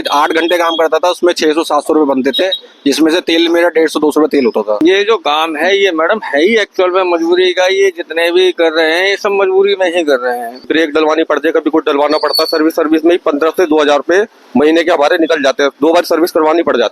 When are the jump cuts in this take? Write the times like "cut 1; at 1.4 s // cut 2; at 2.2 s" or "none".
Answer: cut 1; at 4.8 s // cut 2; at 10.6 s